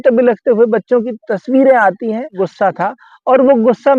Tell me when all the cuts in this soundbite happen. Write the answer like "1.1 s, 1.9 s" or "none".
2.4 s